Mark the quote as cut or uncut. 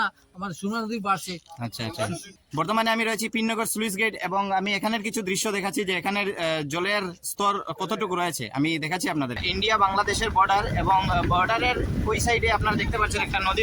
cut